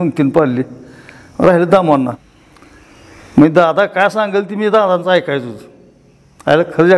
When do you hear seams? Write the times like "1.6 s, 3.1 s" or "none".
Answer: 2.2 s